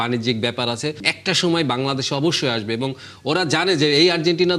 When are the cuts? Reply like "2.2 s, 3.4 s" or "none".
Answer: 1.1 s